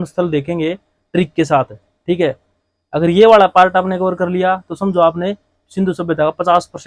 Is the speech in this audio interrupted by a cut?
no; 0 cuts

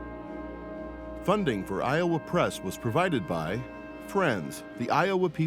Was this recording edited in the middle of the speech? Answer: yes; 1 cut; at 1.2 s

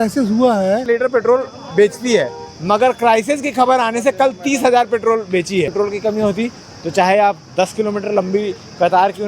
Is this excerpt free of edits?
no; 2 cuts; at 0.8 s, 5.7 s

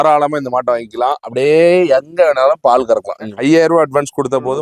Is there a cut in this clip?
yes; 1 cut; at 3.3 s

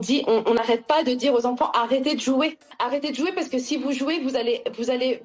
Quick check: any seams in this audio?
yes; 1 cut; at 2.7 s

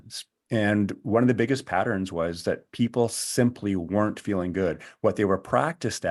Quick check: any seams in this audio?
no; 0 cuts

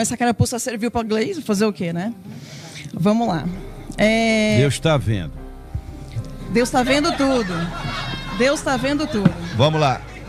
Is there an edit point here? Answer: no; 0 cuts

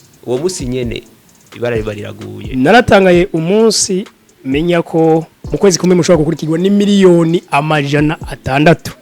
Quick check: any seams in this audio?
yes; 1 cut; at 2.5 s

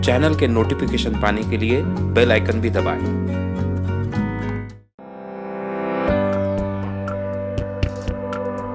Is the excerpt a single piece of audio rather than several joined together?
yes; 0 cuts

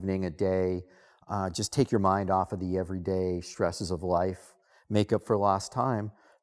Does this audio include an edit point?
no; 0 cuts

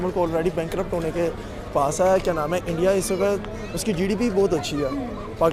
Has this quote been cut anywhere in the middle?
no; 0 cuts

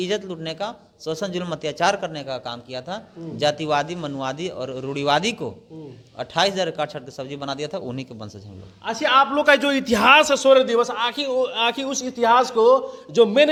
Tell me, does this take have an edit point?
no; 0 cuts

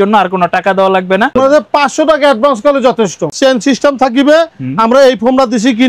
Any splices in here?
yes; 2 cuts; at 1.3 s, 3.4 s

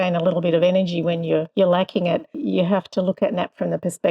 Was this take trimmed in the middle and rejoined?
yes; 2 cuts; at 1.5 s, 2.4 s

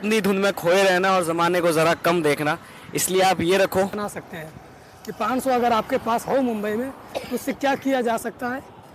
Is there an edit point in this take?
yes; 1 cut; at 4.0 s

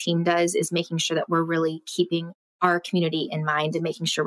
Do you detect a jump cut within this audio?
yes; 1 cut; at 2.4 s

